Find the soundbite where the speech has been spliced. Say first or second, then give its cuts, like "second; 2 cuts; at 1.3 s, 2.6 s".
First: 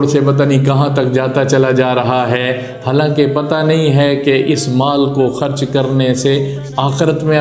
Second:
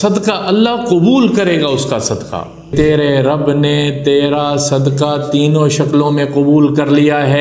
second; 1 cut; at 2.7 s